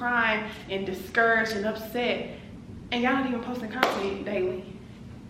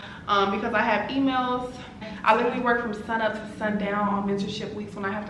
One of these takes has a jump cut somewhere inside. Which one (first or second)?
second